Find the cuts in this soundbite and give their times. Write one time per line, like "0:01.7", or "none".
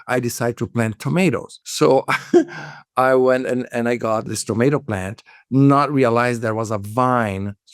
0:01.5
0:04.3